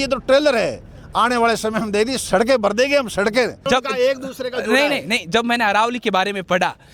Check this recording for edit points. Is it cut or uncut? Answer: cut